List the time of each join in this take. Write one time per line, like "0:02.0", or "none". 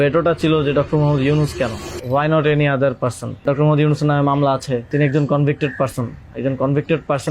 0:01.9
0:03.4
0:04.9

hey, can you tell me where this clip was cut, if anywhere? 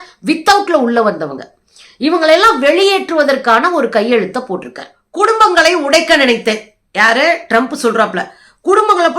0:05.0

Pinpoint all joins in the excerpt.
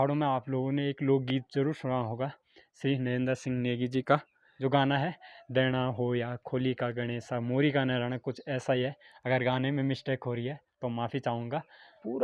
none

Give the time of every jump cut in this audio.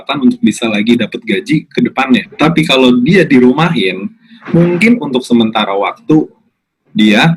0:02.3

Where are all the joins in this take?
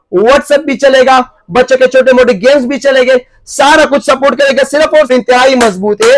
0:05.1

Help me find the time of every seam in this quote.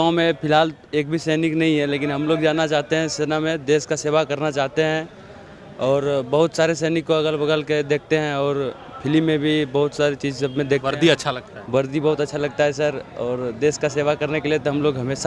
none

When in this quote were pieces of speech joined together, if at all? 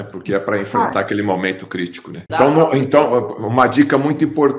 0:02.2

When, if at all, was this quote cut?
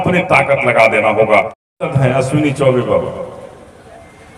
0:01.6

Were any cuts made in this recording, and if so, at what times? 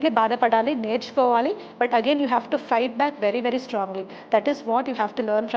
none

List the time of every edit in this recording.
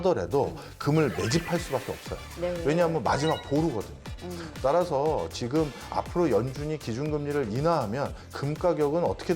0:04.4

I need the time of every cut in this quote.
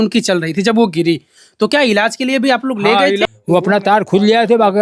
0:03.2

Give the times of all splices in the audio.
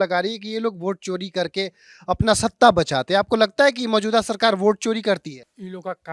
none

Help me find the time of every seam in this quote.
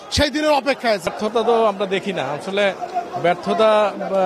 0:01.1

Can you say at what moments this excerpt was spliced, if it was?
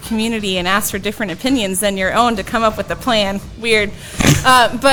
none

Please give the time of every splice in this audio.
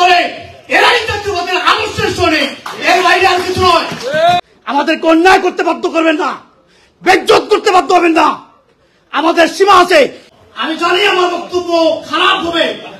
0:04.4
0:10.2

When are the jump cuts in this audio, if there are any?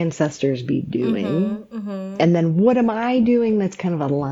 0:02.1

